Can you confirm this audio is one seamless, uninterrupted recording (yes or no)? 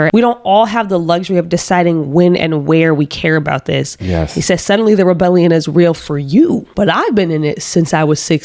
yes